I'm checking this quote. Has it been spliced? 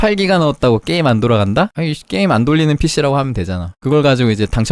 yes; 2 cuts; at 1.8 s, 3.8 s

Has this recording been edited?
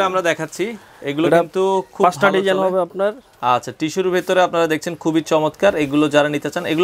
no; 0 cuts

